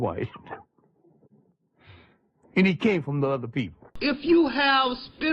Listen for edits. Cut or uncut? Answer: uncut